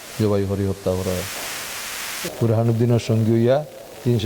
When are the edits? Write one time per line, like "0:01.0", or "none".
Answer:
0:02.2